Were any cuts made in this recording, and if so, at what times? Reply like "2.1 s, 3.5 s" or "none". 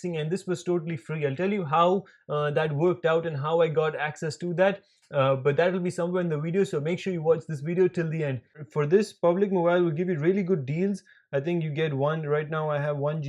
8.6 s